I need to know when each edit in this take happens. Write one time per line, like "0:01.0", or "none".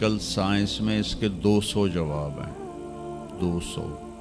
none